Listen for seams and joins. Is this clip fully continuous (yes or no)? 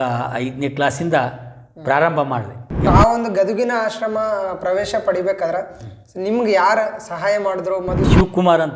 no